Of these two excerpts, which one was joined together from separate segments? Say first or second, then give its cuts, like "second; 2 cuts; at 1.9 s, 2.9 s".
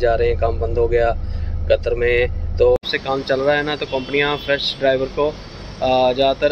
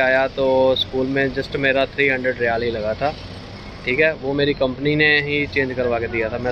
first; 1 cut; at 2.8 s